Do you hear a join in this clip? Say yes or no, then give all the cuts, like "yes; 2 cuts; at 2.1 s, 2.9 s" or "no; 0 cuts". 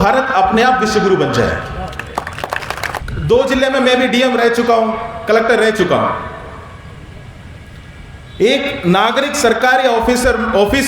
yes; 1 cut; at 3.0 s